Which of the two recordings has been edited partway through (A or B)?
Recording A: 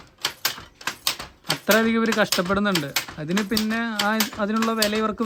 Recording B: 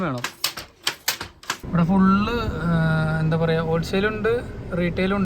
B